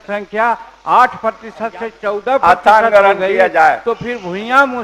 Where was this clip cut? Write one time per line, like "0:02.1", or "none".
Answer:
none